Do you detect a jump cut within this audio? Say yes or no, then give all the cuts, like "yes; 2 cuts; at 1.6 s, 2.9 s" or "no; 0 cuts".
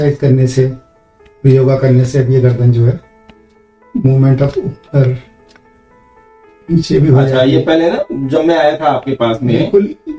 no; 0 cuts